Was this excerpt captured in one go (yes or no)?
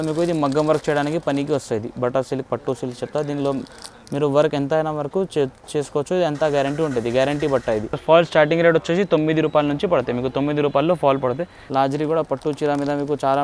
no